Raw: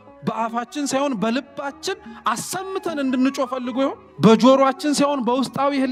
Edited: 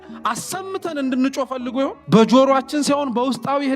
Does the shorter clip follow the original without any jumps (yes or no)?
no